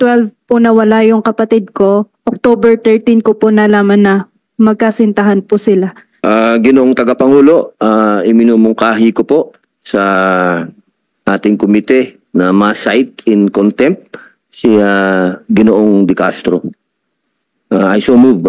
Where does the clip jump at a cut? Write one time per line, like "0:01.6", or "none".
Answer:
0:06.0

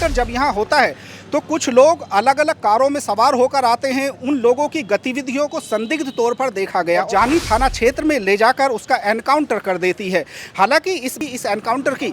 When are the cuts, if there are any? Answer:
0:07.1
0:11.2

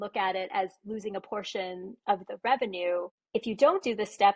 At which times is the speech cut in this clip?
0:03.2

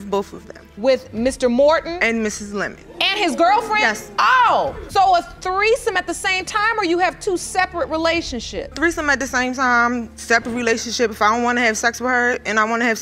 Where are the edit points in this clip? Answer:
0:04.0
0:08.8

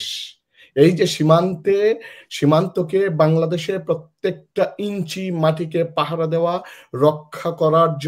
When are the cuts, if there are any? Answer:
none

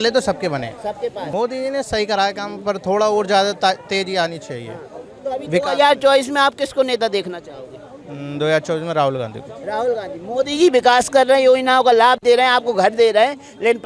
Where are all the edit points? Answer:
0:01.2

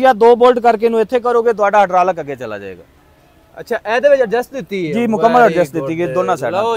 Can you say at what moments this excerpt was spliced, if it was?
none

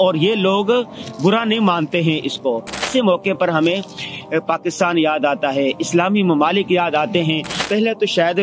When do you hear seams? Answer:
0:02.9
0:07.6

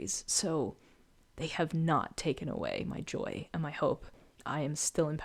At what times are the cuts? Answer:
none

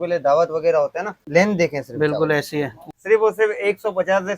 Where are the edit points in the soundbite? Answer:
0:01.1
0:02.8

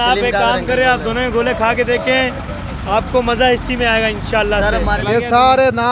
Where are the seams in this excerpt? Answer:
0:05.0

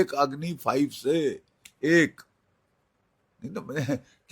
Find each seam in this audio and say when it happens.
none

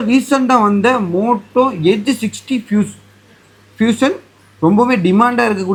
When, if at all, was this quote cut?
none

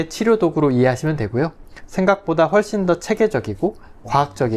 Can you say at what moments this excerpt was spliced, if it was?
none

